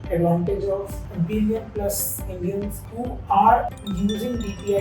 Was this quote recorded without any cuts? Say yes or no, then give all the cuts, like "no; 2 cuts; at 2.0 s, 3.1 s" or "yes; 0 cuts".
no; 3 cuts; at 1.0 s, 2.9 s, 3.8 s